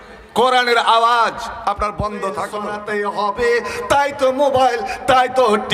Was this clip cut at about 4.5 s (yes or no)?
no